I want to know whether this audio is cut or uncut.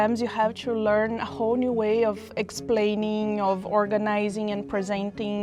uncut